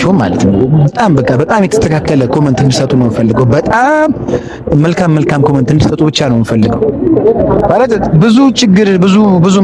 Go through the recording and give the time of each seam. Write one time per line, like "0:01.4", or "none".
0:07.2